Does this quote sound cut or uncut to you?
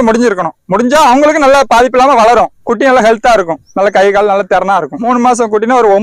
cut